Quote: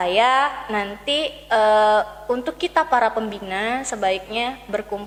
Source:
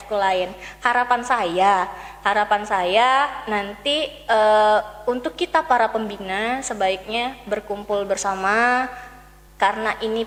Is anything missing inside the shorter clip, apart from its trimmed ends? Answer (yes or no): no